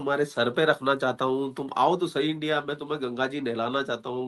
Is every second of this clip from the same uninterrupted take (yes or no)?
yes